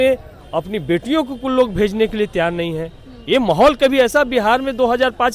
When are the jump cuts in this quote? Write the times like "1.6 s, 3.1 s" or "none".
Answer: none